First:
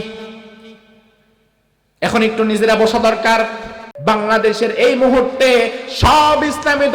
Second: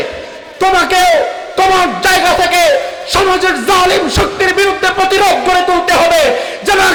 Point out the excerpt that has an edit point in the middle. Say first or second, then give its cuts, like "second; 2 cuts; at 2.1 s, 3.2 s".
first; 1 cut; at 3.9 s